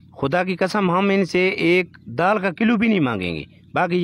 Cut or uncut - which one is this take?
uncut